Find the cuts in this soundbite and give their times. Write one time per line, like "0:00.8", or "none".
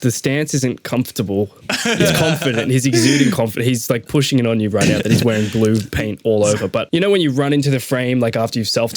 0:01.6
0:06.9